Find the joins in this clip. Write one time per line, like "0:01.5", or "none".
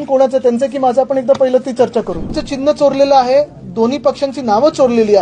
0:02.4